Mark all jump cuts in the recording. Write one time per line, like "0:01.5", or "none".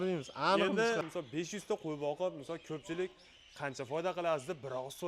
0:01.0